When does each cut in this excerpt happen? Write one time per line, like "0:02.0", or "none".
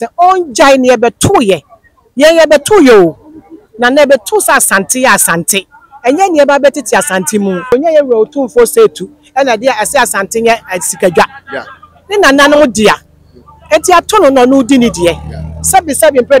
0:07.7